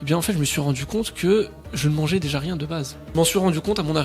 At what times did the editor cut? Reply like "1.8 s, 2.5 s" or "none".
3.1 s

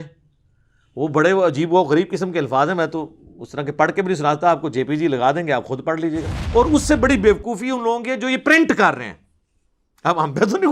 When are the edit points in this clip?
6.3 s

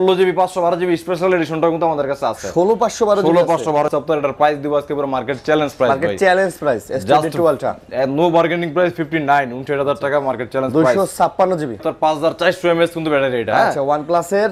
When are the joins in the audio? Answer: 3.9 s, 11.8 s

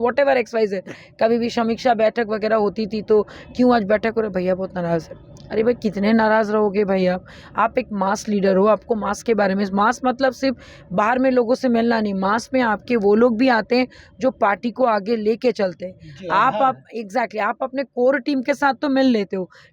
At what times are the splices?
none

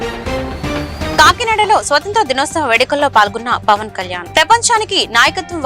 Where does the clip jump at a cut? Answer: 1.0 s

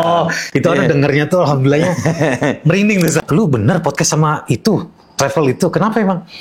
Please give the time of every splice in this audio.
3.2 s

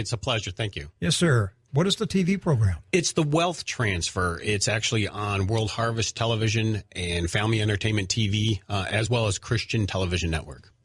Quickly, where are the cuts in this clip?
8.1 s

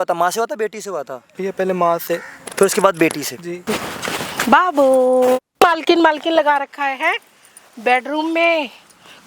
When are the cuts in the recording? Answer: 1.2 s, 3.6 s, 5.5 s

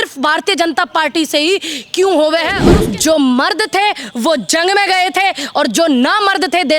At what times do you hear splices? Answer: 2.6 s

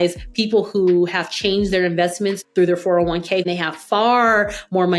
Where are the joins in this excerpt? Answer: 2.4 s, 3.4 s

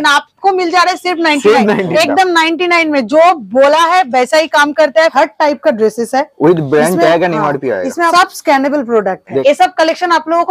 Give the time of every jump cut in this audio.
1.9 s, 5.1 s, 8.1 s, 9.4 s

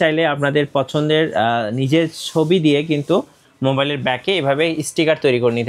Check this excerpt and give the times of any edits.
none

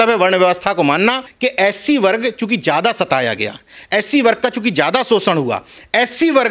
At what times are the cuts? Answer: 1.3 s

